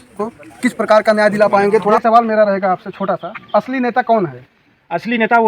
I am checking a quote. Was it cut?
yes; 1 cut; at 2.0 s

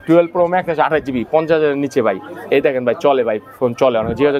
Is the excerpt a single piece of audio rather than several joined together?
yes; 0 cuts

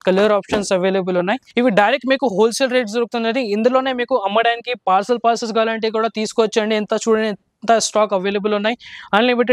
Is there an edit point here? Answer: yes; 1 cut; at 1.4 s

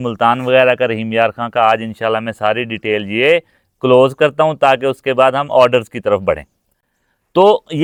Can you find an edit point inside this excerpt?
no; 0 cuts

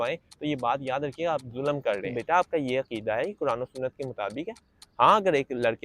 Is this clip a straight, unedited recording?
no; 1 cut; at 2.1 s

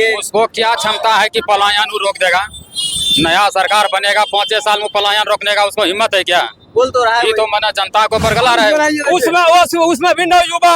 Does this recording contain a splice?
yes; 1 cut; at 8.7 s

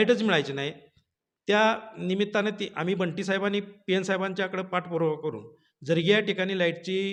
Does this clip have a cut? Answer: no; 0 cuts

